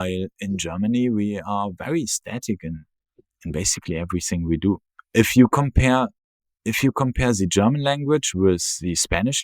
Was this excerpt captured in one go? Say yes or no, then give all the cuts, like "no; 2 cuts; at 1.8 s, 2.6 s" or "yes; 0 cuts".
yes; 0 cuts